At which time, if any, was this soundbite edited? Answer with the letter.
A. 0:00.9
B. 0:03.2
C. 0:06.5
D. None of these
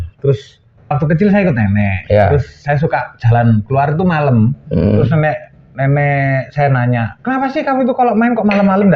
A